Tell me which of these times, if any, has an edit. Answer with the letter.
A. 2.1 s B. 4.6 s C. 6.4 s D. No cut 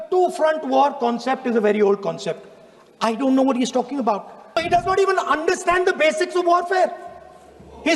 B